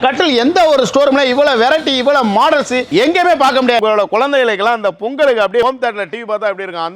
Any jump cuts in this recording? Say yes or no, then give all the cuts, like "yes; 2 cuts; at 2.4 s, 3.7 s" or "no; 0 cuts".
yes; 2 cuts; at 3.8 s, 5.6 s